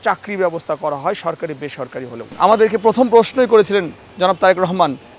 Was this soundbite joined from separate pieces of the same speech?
yes; 1 cut; at 2.3 s

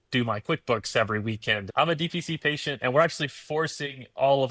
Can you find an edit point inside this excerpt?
yes; 1 cut; at 1.6 s

